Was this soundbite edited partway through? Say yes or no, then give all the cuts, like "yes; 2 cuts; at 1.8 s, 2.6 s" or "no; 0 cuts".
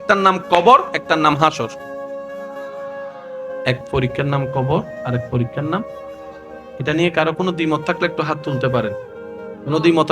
yes; 2 cuts; at 1.9 s, 3.5 s